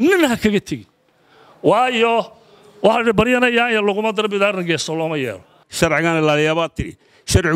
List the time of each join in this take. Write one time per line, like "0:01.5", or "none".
0:05.6